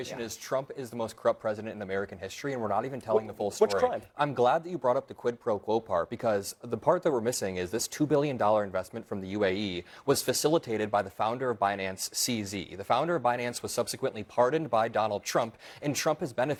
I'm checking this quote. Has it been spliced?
no; 0 cuts

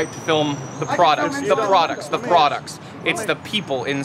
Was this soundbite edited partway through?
no; 0 cuts

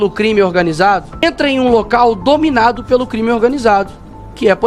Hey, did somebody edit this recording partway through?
yes; 1 cut; at 1.2 s

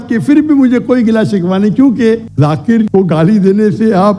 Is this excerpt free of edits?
no; 1 cut; at 2.3 s

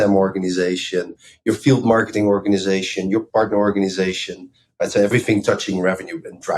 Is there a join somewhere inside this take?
yes; 3 cuts; at 1.2 s, 3.3 s, 5.1 s

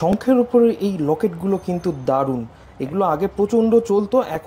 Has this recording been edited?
no; 0 cuts

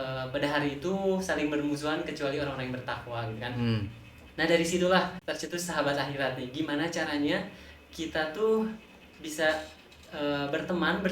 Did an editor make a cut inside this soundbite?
yes; 1 cut; at 5.2 s

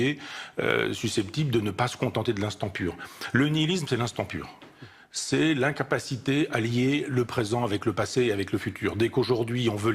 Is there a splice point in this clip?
yes; 1 cut; at 2.2 s

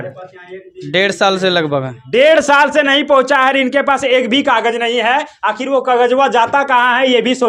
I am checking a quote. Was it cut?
no; 0 cuts

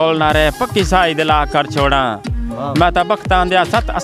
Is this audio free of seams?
yes; 0 cuts

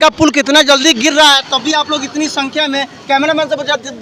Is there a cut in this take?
no; 0 cuts

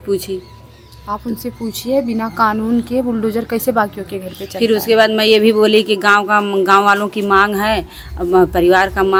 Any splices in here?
no; 0 cuts

